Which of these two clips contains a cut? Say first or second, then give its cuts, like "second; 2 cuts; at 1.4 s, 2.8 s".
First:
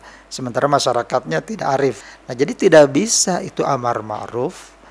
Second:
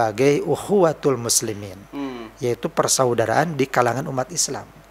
first; 1 cut; at 2.0 s